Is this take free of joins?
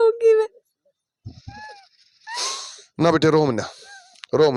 yes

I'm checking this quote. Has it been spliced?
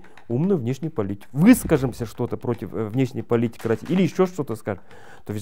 yes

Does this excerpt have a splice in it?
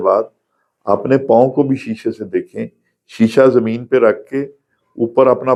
no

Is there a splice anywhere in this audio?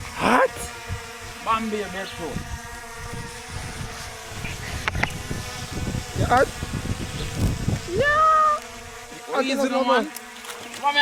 no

